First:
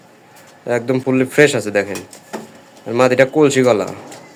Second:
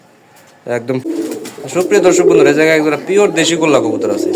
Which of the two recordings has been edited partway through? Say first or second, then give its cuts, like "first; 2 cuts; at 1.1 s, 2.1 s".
second; 1 cut; at 1.0 s